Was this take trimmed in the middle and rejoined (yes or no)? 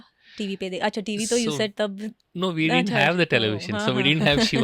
no